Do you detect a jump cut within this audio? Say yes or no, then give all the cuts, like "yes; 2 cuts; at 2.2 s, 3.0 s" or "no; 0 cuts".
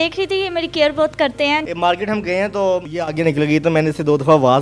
yes; 2 cuts; at 1.6 s, 2.9 s